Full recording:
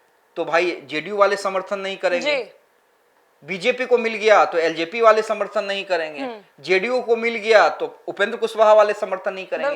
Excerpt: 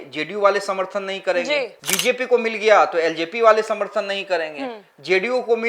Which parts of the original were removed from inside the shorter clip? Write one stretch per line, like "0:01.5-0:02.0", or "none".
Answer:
0:02.6-0:03.4